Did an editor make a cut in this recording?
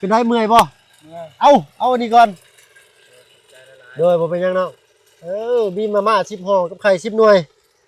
no; 0 cuts

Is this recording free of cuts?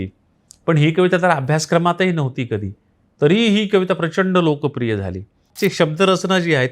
no; 1 cut; at 5.4 s

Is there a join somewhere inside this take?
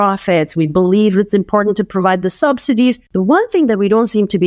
yes; 1 cut; at 3.0 s

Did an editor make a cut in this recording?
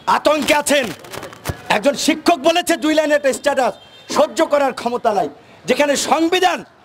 no; 0 cuts

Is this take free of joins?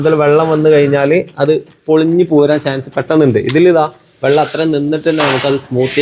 yes; 0 cuts

